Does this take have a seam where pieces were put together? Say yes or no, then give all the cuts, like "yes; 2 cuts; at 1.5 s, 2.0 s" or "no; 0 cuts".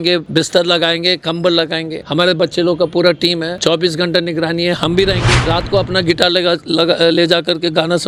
no; 0 cuts